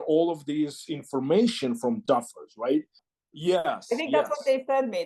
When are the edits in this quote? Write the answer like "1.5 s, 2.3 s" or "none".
3.0 s